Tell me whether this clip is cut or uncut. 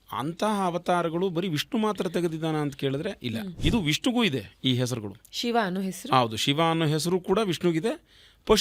cut